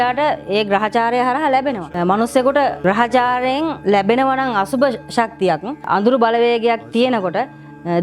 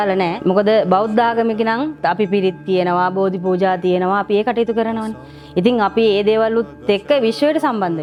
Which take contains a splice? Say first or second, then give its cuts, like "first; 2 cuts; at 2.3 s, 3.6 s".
first; 1 cut; at 5.8 s